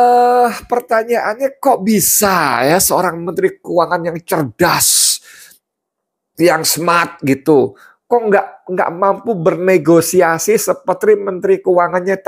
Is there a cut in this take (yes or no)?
no